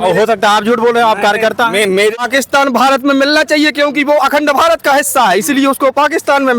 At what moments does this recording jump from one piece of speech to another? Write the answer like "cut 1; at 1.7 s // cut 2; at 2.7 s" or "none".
cut 1; at 2.2 s